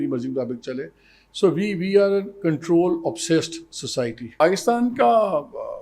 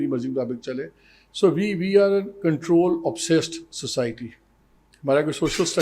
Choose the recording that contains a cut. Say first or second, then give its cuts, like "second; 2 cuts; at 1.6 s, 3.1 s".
first; 1 cut; at 4.4 s